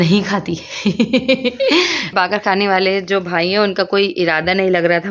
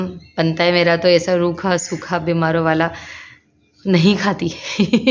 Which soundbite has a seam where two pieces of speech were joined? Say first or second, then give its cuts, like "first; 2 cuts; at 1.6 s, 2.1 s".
first; 1 cut; at 2.1 s